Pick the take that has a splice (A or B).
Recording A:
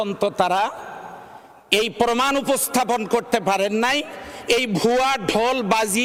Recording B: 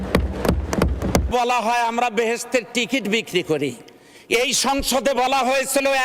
B